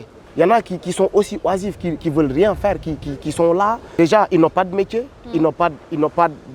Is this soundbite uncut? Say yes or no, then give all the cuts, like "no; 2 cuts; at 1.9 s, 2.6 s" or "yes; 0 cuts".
yes; 0 cuts